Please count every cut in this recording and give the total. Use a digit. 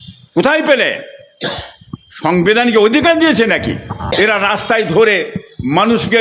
1